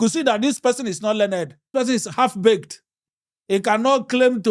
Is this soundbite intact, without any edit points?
no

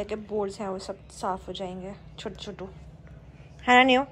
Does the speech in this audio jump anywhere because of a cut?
no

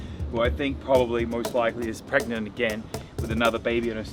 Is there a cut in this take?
no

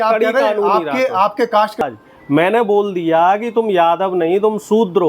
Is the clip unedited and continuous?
no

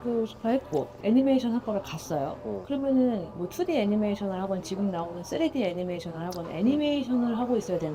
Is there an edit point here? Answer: yes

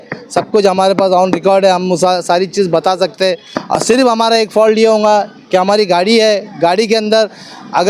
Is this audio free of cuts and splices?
no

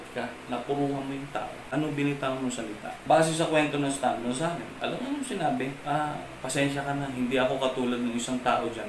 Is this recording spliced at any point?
yes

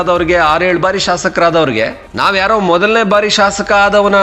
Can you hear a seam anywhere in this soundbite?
yes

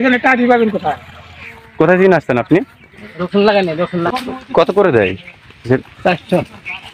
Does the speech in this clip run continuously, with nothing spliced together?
no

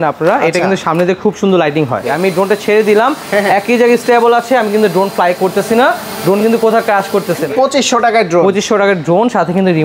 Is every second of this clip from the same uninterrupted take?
no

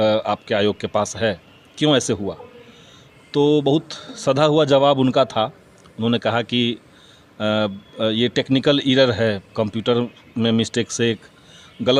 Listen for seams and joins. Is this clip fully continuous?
yes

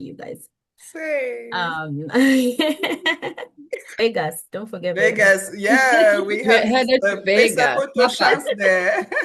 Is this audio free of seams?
no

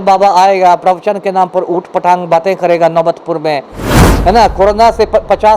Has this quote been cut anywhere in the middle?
yes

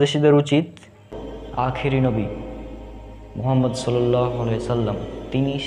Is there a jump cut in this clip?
yes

